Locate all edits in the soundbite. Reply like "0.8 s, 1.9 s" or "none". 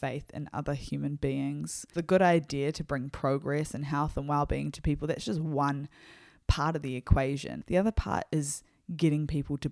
1.9 s, 7.5 s